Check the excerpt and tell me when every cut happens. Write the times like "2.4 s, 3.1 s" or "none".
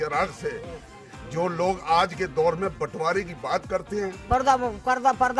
4.2 s